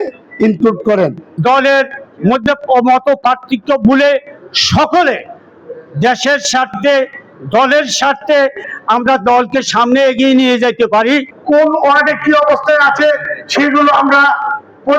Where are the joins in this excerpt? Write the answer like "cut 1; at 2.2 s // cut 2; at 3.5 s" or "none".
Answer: cut 1; at 1.3 s // cut 2; at 2.0 s // cut 3; at 8.7 s // cut 4; at 11.3 s